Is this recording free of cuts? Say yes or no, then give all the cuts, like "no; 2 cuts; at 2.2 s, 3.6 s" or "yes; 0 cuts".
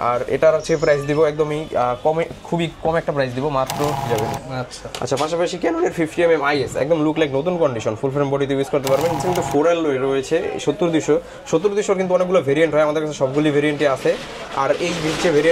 no; 2 cuts; at 4.1 s, 9.2 s